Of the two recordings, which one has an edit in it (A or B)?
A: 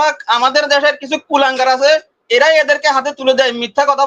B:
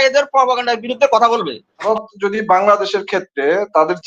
B